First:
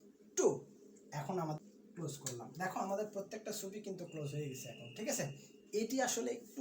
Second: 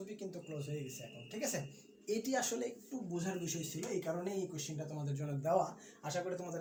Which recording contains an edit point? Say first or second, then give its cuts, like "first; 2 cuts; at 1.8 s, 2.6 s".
first; 1 cut; at 1.6 s